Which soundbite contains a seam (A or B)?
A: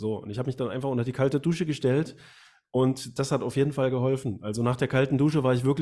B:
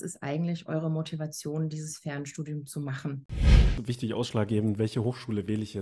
B